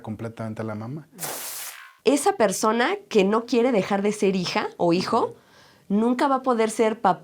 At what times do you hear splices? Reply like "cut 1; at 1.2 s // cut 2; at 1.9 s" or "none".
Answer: cut 1; at 1.5 s